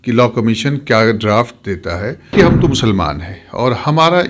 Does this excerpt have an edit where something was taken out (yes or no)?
yes